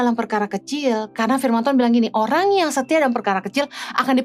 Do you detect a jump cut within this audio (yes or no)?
no